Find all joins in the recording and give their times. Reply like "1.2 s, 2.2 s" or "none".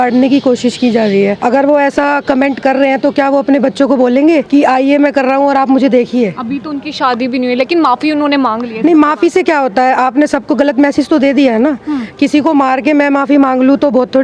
1.4 s, 4.5 s